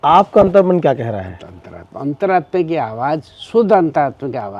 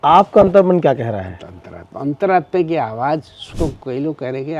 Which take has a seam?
second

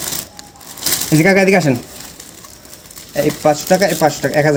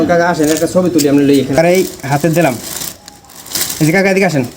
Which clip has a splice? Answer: second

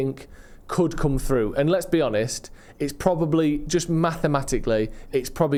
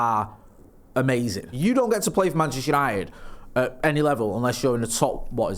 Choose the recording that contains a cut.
second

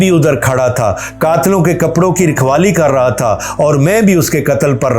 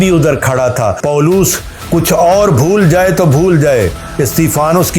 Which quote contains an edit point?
second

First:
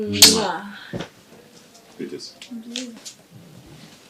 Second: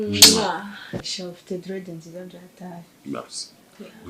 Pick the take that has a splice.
second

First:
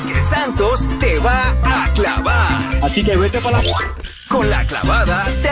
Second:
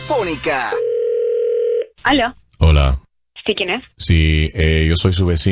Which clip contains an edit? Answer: second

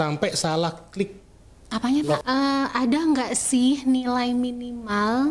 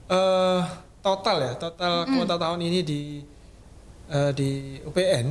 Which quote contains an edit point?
first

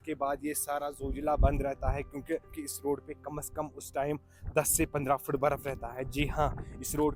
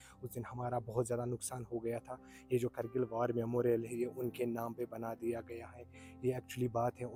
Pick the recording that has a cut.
first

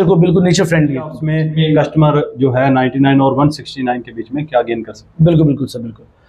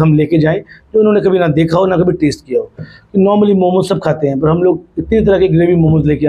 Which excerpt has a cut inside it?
first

